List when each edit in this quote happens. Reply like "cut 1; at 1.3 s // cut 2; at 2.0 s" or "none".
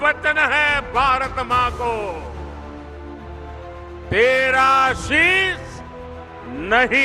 cut 1; at 2.2 s // cut 2; at 4.1 s